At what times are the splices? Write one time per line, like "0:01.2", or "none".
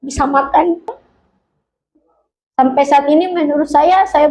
0:01.0

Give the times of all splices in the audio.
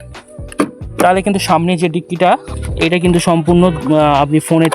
0:02.5

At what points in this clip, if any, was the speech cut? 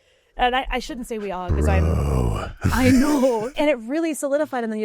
0:03.6

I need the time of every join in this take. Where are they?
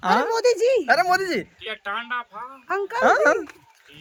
none

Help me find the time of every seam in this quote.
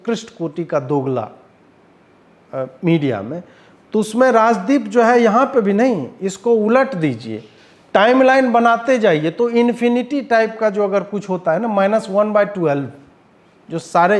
none

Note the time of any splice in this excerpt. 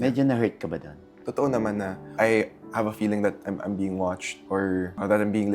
0:01.2
0:02.1

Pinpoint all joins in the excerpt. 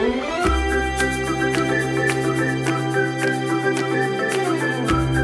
none

